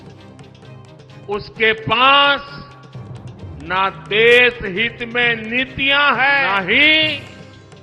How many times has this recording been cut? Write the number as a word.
one